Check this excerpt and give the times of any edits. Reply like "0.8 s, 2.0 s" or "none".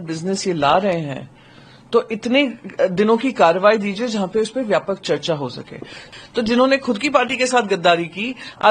6.0 s